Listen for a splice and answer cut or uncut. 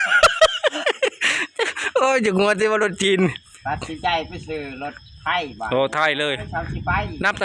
uncut